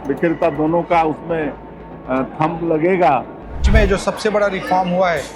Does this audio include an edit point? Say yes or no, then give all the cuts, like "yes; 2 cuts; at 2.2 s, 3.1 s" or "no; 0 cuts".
yes; 1 cut; at 3.6 s